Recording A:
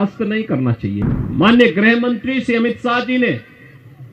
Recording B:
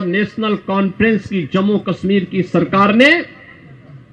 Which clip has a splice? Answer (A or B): A